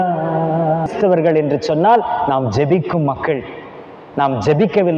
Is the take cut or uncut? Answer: cut